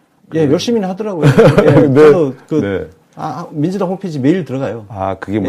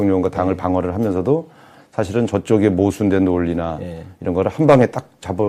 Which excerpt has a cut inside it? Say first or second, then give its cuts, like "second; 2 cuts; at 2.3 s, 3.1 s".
first; 1 cut; at 1.3 s